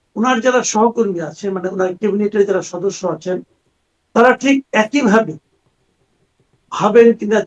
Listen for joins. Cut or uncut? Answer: uncut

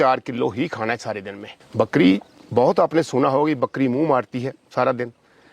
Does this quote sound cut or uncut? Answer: uncut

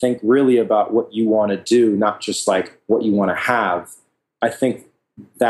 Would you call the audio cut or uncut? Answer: uncut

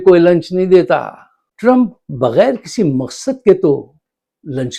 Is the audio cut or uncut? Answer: uncut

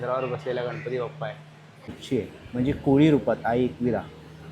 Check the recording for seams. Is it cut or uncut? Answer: cut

